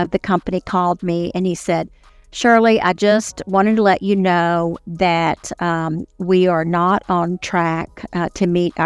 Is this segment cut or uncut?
uncut